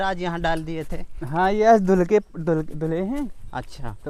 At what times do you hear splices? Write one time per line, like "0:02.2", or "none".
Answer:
none